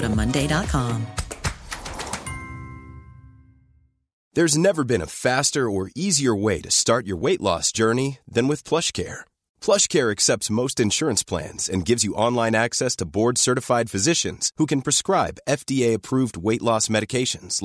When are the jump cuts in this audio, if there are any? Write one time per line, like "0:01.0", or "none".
0:04.2